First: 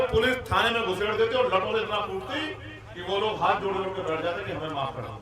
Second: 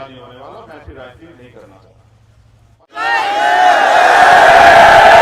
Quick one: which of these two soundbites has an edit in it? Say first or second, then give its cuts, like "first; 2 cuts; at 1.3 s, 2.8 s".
second; 1 cut; at 2.8 s